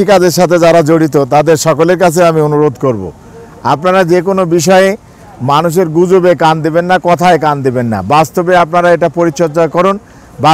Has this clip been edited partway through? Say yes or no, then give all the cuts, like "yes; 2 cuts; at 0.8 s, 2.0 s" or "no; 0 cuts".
no; 0 cuts